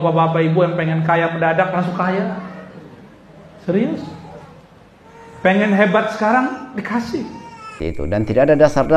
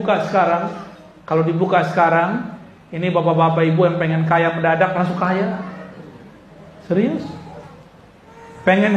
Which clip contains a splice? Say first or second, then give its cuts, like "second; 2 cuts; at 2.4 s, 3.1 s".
first; 1 cut; at 7.8 s